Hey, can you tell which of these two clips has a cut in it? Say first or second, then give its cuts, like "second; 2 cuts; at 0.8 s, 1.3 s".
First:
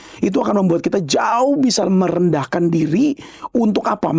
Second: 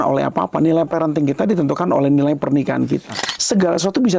second; 1 cut; at 3.1 s